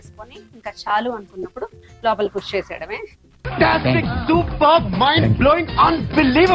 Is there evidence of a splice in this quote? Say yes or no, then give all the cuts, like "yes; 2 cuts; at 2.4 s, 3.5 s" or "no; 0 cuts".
no; 0 cuts